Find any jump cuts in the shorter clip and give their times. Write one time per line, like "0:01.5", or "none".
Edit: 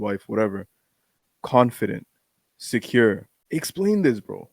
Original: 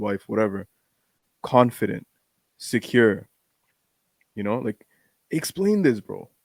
0:03.3